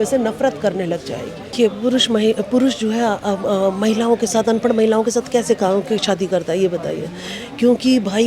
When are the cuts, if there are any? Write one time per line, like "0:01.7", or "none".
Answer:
0:01.5